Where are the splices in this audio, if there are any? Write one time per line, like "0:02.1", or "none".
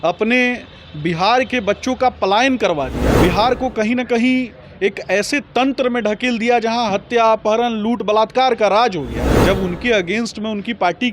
0:03.0
0:09.2